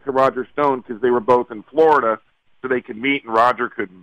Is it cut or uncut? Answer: uncut